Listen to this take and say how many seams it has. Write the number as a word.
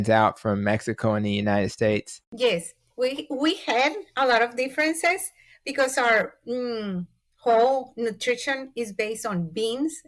one